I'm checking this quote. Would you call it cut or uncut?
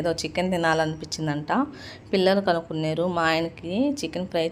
uncut